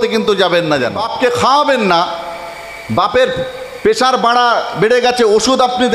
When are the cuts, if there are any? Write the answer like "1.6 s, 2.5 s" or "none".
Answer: 1.1 s

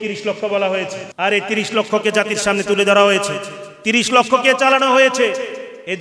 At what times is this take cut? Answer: 1.0 s

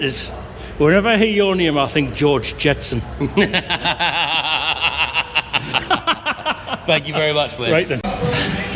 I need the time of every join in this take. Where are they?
none

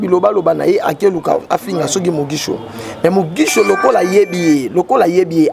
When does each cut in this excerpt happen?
none

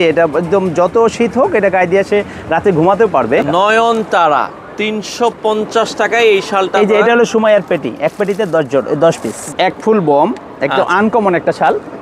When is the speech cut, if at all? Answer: 3.4 s, 9.4 s

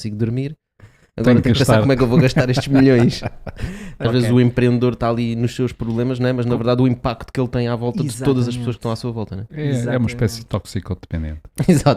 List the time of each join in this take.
4.0 s

